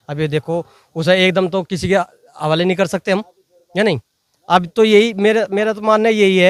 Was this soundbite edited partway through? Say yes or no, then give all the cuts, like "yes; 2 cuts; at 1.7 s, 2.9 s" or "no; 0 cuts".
no; 0 cuts